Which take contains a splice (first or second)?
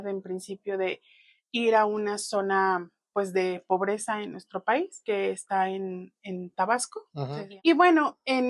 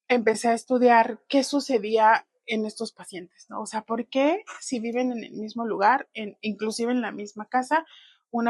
first